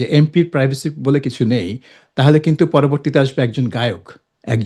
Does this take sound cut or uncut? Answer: uncut